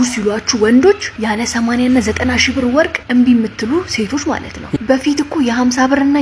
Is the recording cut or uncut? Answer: cut